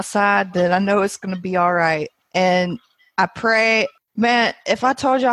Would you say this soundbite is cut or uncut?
cut